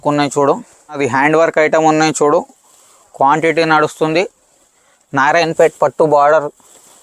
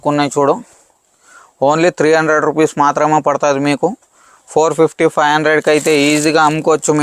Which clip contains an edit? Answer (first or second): first